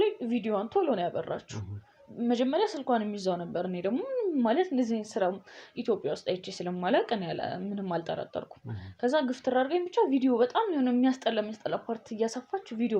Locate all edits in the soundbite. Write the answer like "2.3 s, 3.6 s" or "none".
none